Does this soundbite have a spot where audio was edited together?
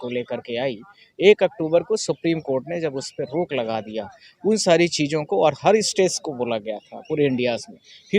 no; 0 cuts

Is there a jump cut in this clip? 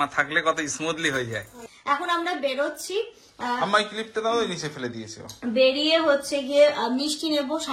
yes; 1 cut; at 1.6 s

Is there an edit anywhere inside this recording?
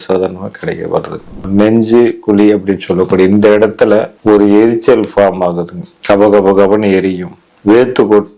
yes; 2 cuts; at 1.3 s, 4.1 s

